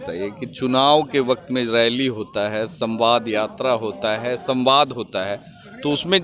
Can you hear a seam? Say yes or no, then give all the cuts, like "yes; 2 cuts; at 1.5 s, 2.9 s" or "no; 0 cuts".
no; 0 cuts